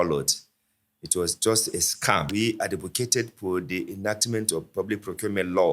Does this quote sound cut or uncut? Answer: cut